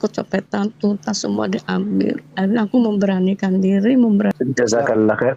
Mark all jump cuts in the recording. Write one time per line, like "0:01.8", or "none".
0:04.3